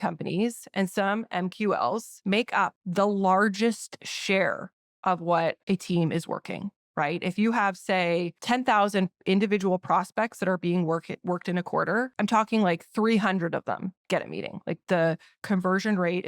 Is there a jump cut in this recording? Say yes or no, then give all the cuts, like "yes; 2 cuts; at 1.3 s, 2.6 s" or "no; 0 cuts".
yes; 4 cuts; at 2.6 s, 5.6 s, 8.3 s, 12.1 s